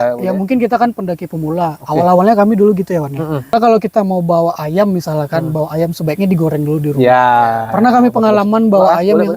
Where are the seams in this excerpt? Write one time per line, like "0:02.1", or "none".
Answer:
0:03.5